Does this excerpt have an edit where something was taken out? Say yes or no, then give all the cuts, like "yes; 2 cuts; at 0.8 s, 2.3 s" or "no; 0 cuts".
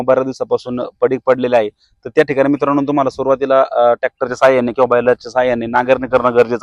no; 0 cuts